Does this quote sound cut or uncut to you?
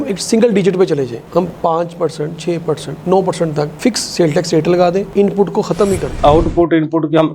cut